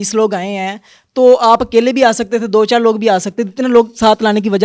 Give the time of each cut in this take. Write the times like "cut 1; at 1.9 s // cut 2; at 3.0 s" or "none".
none